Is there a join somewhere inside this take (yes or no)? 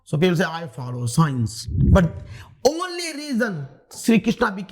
yes